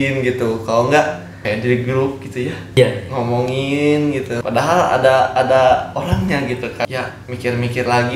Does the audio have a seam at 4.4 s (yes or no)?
yes